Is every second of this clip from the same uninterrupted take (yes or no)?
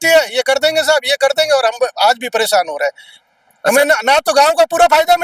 yes